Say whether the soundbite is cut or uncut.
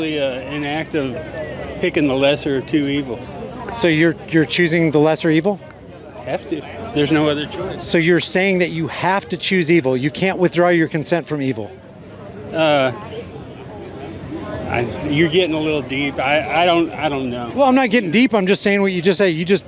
uncut